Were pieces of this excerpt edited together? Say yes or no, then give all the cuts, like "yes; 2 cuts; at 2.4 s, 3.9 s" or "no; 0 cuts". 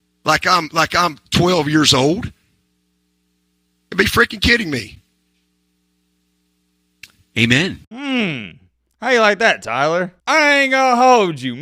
no; 0 cuts